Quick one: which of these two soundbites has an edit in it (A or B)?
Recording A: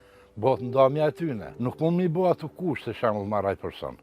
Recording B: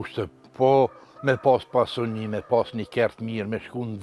A